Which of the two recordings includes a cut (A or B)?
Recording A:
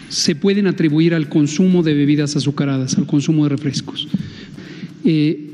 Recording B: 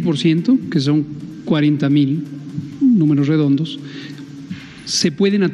A